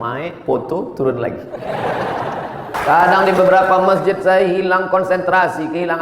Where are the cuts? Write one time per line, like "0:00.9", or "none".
0:02.7